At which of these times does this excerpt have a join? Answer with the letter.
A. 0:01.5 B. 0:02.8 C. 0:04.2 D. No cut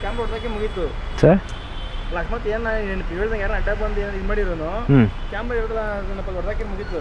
D